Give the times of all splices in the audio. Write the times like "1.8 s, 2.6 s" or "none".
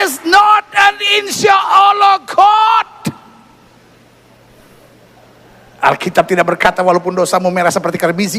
none